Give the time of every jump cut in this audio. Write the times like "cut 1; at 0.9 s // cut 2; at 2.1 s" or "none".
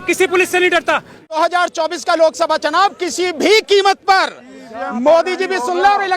cut 1; at 1.4 s